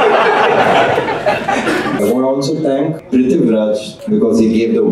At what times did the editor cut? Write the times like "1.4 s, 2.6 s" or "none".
2.0 s, 3.0 s, 3.9 s